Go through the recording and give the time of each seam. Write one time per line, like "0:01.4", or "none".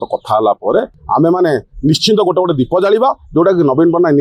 0:01.0